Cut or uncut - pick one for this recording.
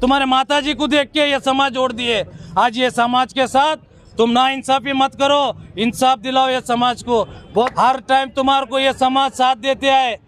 cut